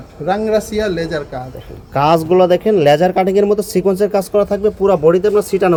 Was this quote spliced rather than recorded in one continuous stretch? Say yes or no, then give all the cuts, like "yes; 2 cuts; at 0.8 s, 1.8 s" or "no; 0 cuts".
no; 0 cuts